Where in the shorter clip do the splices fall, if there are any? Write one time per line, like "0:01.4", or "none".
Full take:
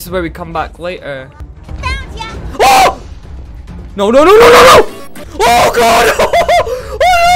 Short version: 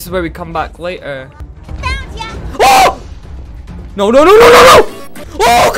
none